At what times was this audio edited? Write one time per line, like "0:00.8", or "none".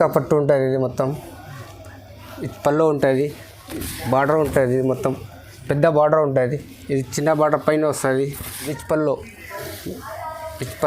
0:08.5